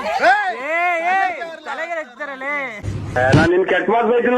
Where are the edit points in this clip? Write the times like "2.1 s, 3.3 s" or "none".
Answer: 2.9 s